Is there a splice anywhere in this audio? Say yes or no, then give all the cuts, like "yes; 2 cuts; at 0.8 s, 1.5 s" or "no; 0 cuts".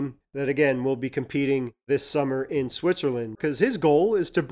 yes; 1 cut; at 3.4 s